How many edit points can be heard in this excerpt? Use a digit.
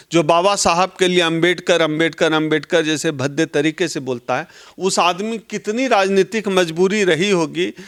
0